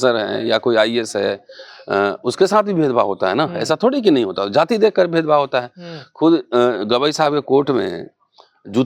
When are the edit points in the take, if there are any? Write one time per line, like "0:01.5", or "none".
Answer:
none